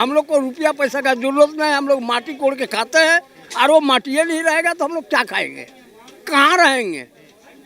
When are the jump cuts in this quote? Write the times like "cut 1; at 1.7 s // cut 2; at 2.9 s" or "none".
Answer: none